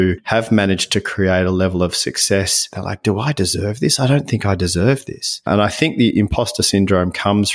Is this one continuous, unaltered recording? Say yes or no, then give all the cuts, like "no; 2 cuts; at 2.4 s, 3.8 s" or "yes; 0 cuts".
no; 1 cut; at 2.7 s